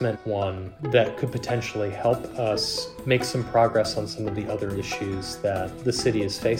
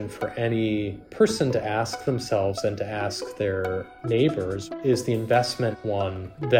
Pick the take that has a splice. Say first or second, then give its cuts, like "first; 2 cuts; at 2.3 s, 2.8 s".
second; 1 cut; at 4.7 s